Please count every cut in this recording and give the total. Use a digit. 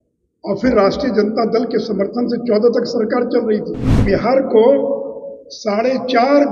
1